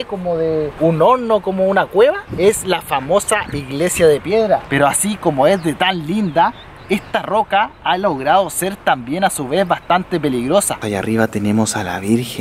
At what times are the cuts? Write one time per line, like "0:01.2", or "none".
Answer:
0:04.6
0:10.8